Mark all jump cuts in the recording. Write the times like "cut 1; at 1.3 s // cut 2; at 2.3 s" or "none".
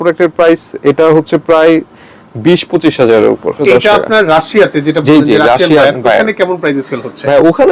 cut 1; at 3.6 s